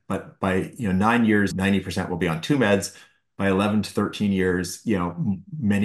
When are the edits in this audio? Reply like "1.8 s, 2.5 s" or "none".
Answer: 1.5 s